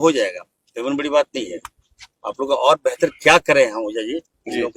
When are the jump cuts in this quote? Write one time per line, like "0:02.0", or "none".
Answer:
none